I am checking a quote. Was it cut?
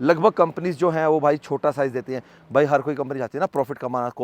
no; 0 cuts

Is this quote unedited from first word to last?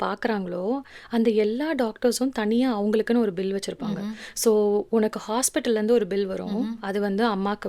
yes; 0 cuts

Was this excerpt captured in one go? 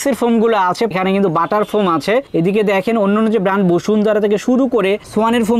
no; 1 cut; at 0.9 s

